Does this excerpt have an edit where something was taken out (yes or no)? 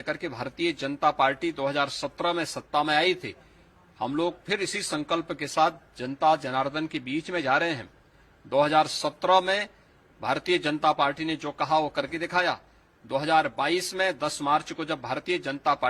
no